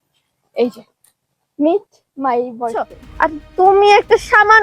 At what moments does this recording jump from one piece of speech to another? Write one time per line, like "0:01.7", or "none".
0:03.0